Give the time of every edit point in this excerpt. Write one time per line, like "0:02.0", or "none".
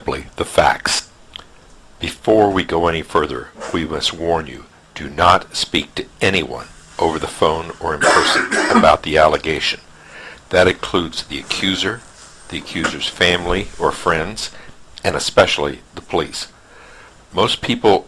0:07.9